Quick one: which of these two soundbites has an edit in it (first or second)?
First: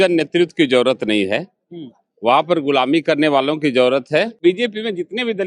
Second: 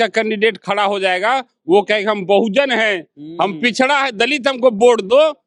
first